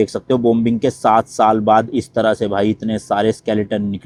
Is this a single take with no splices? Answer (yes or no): yes